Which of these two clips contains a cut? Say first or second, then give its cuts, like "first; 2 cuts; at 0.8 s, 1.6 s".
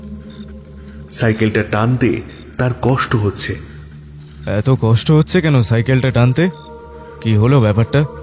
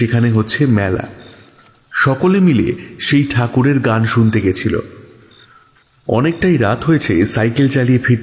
first; 1 cut; at 1.2 s